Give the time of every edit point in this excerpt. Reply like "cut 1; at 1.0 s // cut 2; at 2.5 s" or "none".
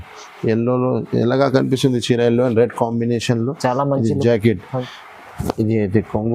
cut 1; at 4.7 s